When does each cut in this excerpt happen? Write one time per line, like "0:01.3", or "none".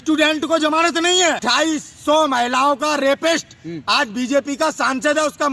0:01.4